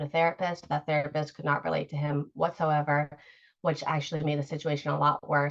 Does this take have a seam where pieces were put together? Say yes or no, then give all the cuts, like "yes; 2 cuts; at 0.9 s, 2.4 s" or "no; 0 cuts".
no; 0 cuts